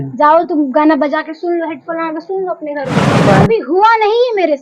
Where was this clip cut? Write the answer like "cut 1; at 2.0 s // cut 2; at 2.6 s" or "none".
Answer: cut 1; at 3.3 s

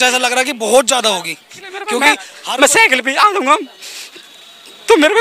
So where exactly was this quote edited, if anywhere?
cut 1; at 1.8 s

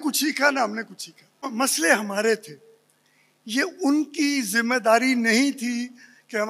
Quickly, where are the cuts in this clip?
cut 1; at 1.5 s

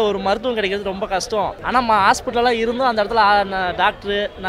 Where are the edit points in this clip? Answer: cut 1; at 1.6 s

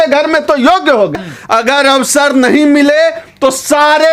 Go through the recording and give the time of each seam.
cut 1; at 1.1 s

